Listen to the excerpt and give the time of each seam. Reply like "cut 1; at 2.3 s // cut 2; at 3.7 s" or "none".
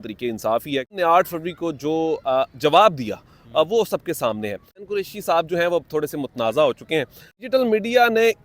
cut 1; at 0.9 s // cut 2; at 4.9 s // cut 3; at 7.4 s